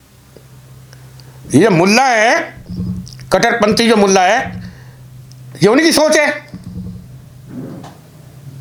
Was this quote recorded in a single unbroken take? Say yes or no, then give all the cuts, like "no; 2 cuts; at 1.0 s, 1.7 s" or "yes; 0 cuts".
yes; 0 cuts